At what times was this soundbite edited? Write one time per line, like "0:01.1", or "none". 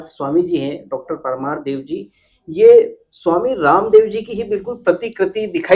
none